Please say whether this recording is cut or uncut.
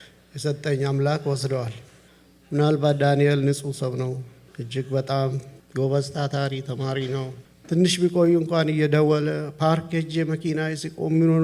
cut